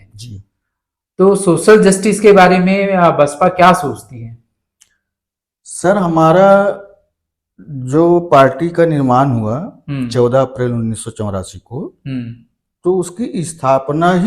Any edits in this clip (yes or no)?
no